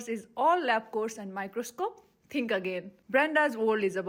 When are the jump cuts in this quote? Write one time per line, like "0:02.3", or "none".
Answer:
none